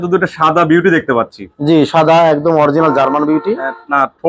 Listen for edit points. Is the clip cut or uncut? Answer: uncut